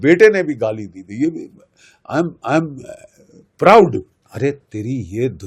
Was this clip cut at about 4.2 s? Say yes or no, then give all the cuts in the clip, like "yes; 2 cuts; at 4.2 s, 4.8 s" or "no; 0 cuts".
yes; 1 cut; at 4.2 s